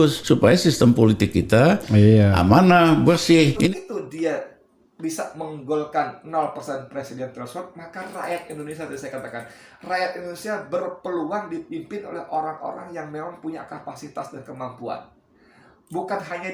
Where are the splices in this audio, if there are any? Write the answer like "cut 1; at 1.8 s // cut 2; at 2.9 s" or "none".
cut 1; at 3.5 s